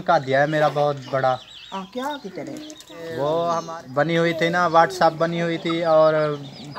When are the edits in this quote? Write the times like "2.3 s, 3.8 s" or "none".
3.7 s